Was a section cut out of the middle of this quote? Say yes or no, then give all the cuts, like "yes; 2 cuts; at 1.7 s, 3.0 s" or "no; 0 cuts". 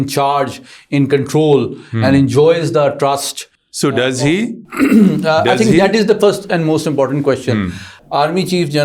yes; 1 cut; at 7.9 s